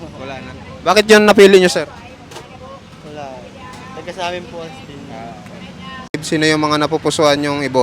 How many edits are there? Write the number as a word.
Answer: one